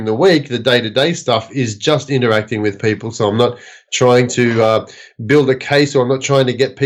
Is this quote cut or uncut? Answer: uncut